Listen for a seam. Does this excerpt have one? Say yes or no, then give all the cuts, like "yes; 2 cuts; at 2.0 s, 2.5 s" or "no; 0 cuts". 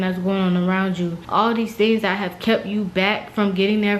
yes; 1 cut; at 1.2 s